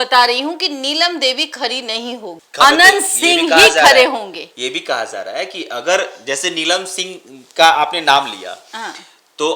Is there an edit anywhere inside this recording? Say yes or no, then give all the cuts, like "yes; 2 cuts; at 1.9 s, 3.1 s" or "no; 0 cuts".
no; 0 cuts